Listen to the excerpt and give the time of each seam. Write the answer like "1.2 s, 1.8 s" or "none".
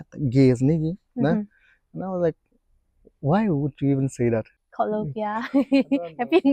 4.5 s